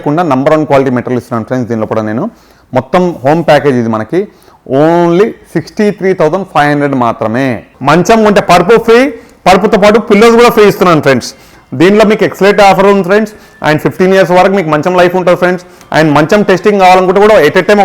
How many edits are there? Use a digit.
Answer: 1